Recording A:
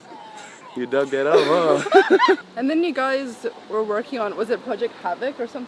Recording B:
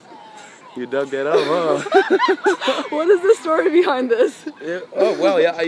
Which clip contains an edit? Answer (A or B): A